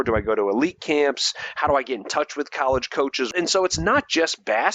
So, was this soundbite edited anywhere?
yes; 1 cut; at 3.3 s

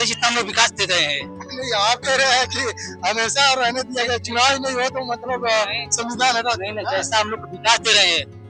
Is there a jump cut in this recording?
no; 0 cuts

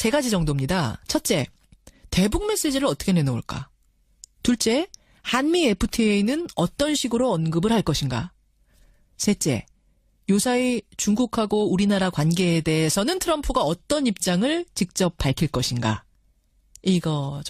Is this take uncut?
no; 1 cut; at 16.0 s

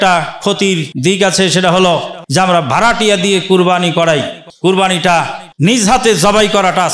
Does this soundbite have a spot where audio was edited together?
yes; 4 cuts; at 0.9 s, 2.2 s, 4.4 s, 5.8 s

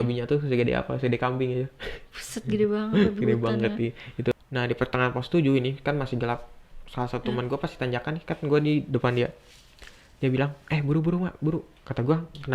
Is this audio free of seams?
no; 1 cut; at 4.3 s

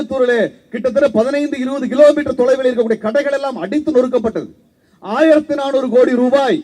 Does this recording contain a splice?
no; 0 cuts

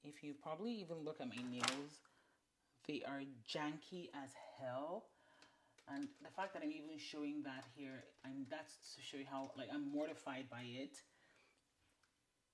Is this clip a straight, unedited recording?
yes; 0 cuts

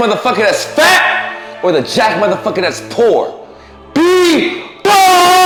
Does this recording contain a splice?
no; 0 cuts

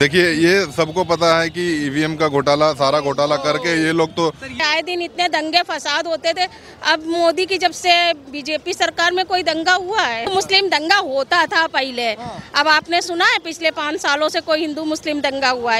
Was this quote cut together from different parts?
yes; 2 cuts; at 4.6 s, 10.3 s

